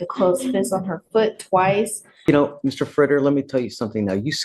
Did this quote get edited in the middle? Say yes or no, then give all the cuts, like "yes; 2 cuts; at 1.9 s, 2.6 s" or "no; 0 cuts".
yes; 1 cut; at 2.1 s